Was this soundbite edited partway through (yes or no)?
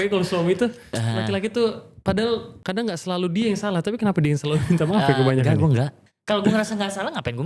yes